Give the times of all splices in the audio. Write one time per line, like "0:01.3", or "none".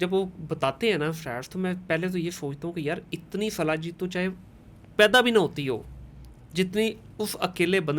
none